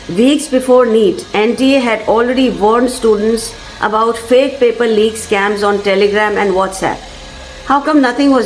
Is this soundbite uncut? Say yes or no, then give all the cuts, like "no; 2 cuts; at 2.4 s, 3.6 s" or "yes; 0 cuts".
yes; 0 cuts